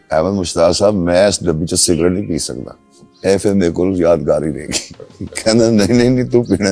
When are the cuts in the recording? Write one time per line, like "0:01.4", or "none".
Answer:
none

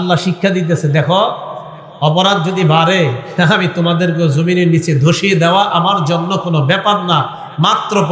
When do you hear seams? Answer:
none

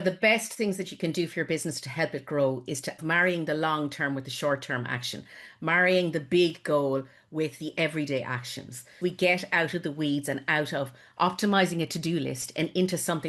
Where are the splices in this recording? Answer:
0:03.0
0:08.8

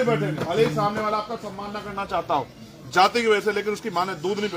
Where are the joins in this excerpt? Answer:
none

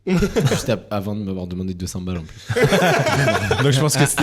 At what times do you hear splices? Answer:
none

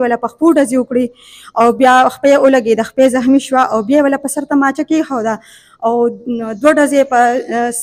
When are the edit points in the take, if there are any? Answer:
none

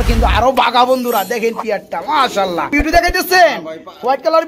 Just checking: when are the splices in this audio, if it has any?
0:02.7

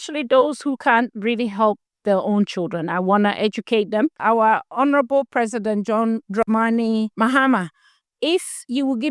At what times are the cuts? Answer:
0:04.5
0:06.2
0:07.1

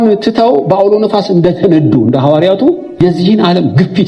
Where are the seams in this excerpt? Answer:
0:03.0

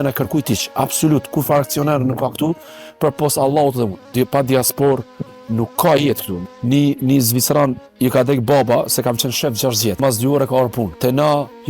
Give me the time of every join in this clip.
0:04.0
0:06.3
0:10.0
0:10.9

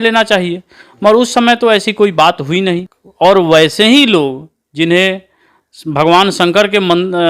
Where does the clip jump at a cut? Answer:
0:03.0

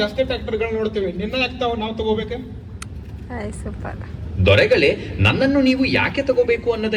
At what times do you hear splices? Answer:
none

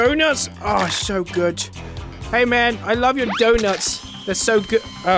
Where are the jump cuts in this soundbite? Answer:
none

